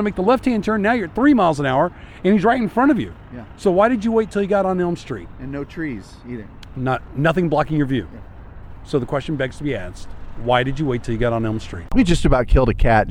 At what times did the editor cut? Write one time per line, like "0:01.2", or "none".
0:11.9